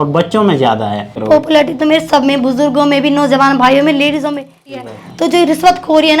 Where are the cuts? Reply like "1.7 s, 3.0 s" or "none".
1.2 s, 4.8 s